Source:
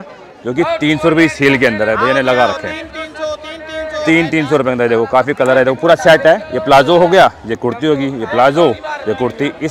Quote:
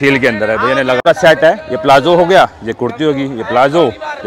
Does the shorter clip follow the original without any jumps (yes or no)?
no